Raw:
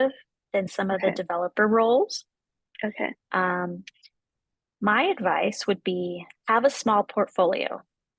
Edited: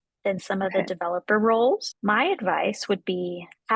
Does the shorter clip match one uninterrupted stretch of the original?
no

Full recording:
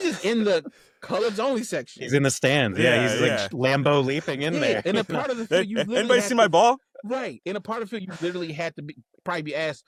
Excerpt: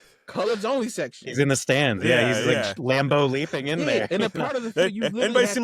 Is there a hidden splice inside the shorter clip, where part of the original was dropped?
no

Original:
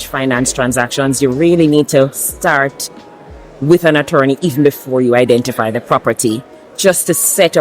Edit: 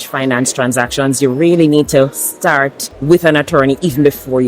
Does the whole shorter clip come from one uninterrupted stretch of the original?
no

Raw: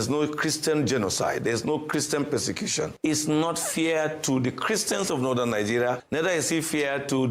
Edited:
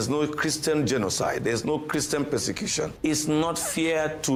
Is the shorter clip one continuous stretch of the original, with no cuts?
yes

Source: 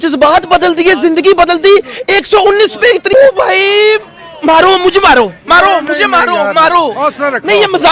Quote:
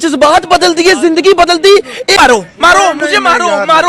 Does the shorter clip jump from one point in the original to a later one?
yes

